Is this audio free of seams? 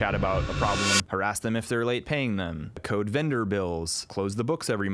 no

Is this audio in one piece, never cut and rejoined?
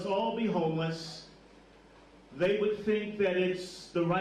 yes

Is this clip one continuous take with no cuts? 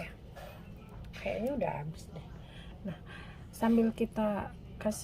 yes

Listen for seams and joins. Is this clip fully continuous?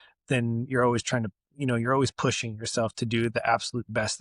yes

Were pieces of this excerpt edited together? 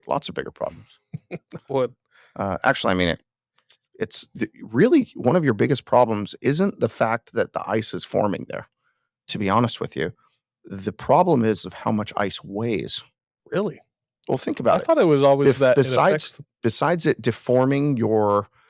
no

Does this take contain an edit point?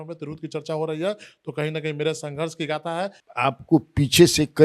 yes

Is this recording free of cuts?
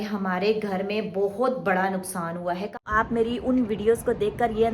no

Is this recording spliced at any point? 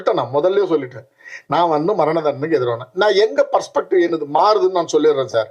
no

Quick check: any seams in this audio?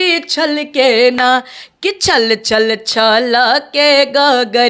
no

